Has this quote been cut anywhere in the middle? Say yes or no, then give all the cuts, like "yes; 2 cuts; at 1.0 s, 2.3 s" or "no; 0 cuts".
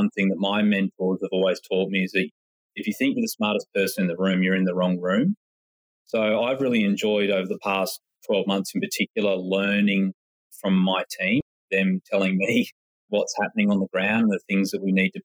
yes; 1 cut; at 11.6 s